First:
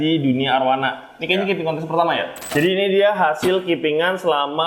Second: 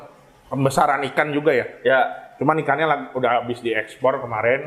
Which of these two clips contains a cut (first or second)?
first